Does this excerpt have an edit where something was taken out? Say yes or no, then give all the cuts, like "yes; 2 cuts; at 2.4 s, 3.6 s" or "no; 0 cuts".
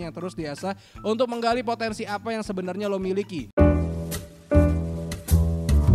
yes; 1 cut; at 3.4 s